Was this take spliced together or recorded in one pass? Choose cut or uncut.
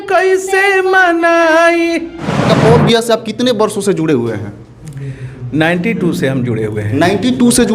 cut